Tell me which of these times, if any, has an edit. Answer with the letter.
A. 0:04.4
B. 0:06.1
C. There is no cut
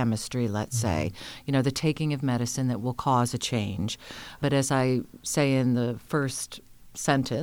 A